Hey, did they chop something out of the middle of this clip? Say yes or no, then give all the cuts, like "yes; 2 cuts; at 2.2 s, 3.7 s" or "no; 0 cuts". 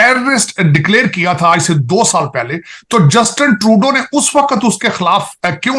no; 0 cuts